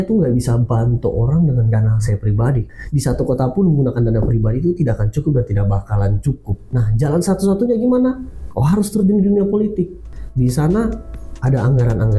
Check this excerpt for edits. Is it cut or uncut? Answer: cut